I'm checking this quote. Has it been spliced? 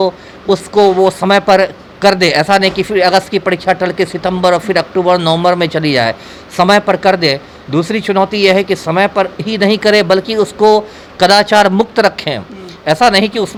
no; 0 cuts

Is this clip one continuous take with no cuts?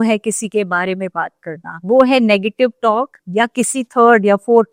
yes; 0 cuts

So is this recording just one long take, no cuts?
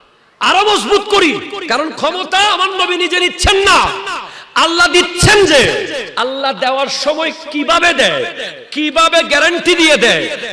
no; 2 cuts; at 1.5 s, 6.1 s

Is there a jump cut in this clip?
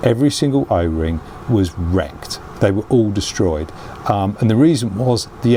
no; 0 cuts

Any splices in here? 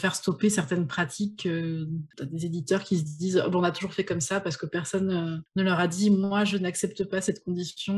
yes; 2 cuts; at 2.1 s, 5.4 s

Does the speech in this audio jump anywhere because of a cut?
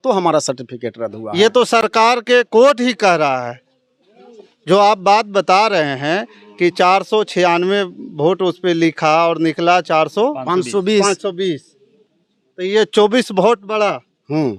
no; 0 cuts

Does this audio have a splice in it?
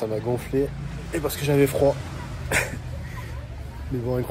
no; 0 cuts

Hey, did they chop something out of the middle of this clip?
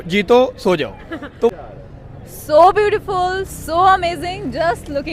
yes; 1 cut; at 1.5 s

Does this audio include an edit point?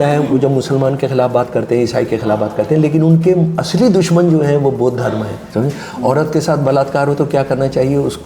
yes; 1 cut; at 5.4 s

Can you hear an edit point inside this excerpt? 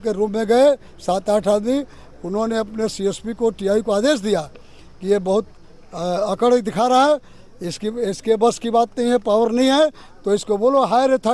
no; 0 cuts

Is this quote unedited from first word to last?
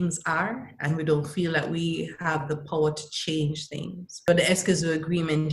no; 1 cut; at 4.3 s

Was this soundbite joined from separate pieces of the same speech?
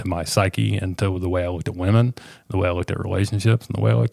no; 0 cuts

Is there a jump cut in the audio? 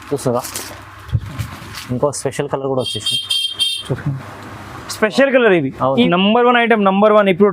yes; 1 cut; at 6.1 s

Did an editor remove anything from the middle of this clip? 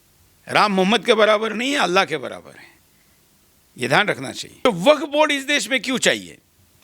yes; 1 cut; at 4.6 s

